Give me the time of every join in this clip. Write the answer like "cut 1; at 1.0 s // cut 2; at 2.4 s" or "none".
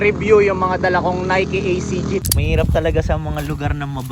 cut 1; at 2.2 s